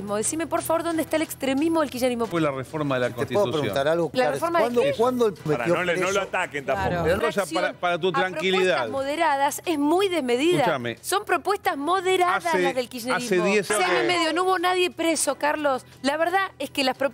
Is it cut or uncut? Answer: cut